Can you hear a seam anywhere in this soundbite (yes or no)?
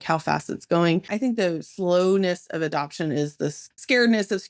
yes